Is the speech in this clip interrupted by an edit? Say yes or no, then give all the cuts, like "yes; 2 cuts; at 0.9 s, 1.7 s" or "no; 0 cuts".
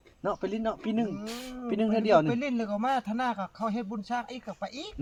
no; 0 cuts